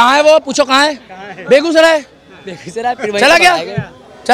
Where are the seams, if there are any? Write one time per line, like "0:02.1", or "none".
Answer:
none